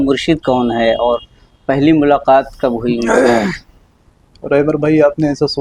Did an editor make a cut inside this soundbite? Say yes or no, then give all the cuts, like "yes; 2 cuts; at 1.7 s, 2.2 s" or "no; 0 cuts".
no; 0 cuts